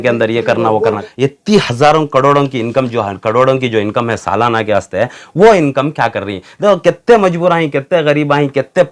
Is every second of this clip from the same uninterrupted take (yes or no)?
no